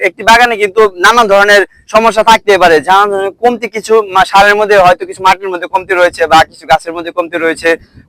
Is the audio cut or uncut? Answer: uncut